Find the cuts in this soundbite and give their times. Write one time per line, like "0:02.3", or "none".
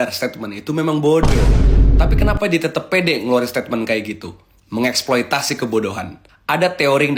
none